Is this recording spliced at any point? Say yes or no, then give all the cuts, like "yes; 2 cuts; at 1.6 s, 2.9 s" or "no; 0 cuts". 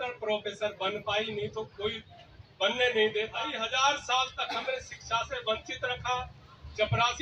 yes; 1 cut; at 3.6 s